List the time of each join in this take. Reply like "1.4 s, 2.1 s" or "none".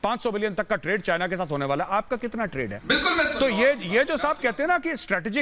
none